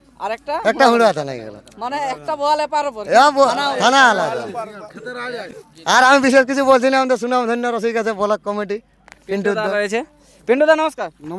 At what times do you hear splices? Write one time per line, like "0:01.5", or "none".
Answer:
none